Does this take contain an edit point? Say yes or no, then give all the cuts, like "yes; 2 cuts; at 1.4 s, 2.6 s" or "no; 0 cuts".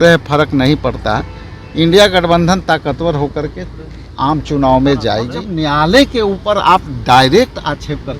yes; 1 cut; at 5.4 s